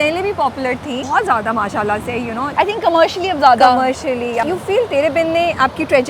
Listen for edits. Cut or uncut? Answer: cut